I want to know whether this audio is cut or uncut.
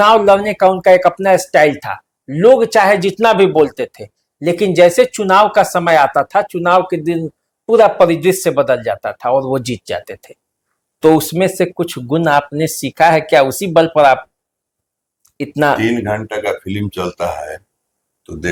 uncut